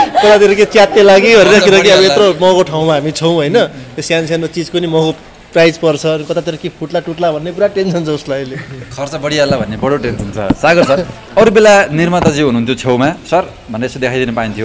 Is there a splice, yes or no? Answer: no